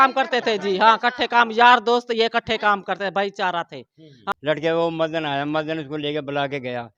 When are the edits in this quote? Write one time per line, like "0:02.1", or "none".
0:04.1